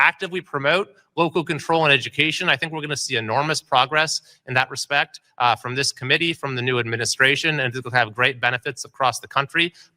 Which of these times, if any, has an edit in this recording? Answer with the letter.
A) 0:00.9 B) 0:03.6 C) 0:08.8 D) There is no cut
A